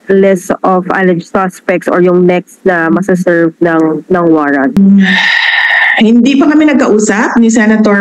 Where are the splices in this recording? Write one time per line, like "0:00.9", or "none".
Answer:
0:04.8